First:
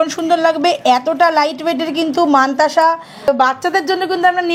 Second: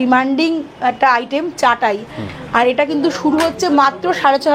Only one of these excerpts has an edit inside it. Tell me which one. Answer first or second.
first